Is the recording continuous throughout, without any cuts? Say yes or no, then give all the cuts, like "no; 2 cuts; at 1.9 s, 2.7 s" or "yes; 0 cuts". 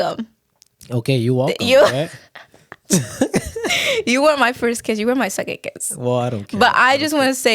yes; 0 cuts